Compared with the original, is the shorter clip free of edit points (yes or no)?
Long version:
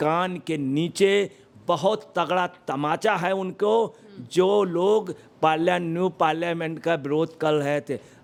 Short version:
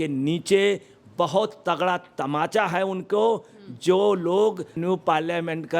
no